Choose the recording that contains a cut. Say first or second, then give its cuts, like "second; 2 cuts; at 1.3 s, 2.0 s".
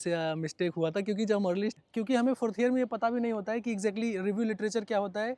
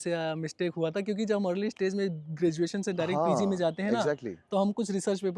first; 1 cut; at 1.8 s